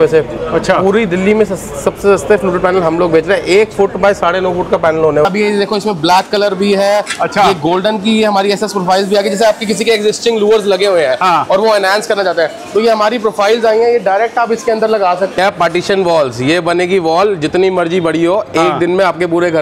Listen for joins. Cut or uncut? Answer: cut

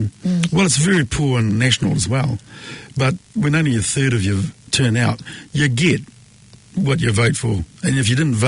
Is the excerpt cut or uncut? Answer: cut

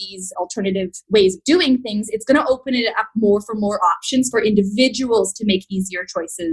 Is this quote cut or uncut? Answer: uncut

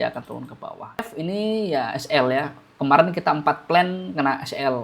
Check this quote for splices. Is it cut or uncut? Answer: cut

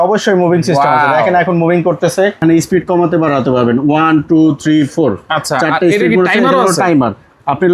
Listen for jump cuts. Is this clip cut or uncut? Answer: cut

